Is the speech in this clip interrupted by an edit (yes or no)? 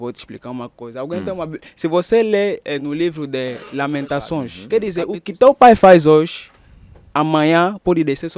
yes